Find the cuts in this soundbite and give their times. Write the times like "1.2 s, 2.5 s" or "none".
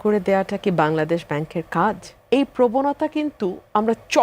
2.1 s